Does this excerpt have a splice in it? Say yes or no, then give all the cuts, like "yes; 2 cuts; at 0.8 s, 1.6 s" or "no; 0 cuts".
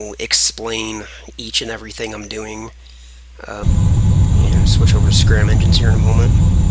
no; 0 cuts